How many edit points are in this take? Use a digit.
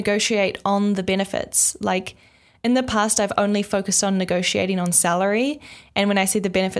0